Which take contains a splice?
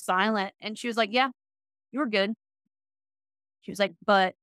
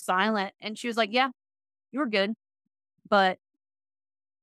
second; 1 cut; at 3.0 s

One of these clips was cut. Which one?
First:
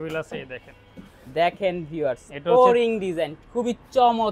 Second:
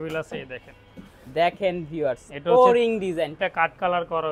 second; 1 cut; at 3.4 s

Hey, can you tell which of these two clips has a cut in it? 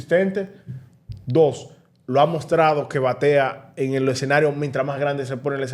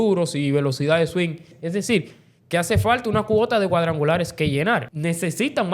second; 2 cuts; at 1.5 s, 4.9 s

